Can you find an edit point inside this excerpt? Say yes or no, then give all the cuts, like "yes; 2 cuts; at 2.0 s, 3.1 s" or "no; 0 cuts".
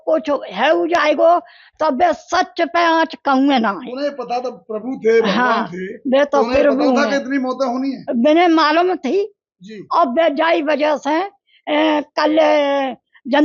no; 0 cuts